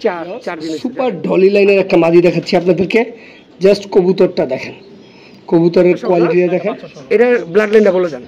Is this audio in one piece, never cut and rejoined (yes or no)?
no